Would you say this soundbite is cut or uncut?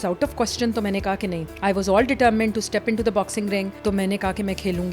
cut